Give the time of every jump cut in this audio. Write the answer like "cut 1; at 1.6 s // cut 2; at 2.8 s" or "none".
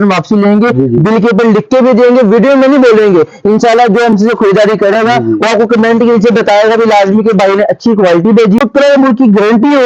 cut 1; at 8.6 s